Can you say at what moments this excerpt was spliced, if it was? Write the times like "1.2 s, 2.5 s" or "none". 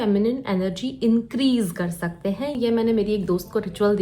2.6 s